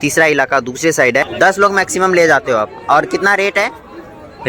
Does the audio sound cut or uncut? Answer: cut